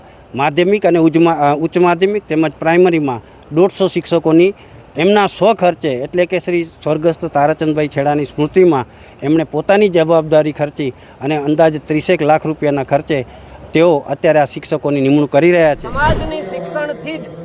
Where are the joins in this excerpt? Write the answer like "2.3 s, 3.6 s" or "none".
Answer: 15.9 s